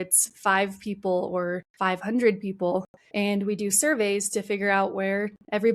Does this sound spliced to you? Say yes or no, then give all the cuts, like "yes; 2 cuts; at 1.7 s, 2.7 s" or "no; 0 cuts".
yes; 2 cuts; at 1.7 s, 3.0 s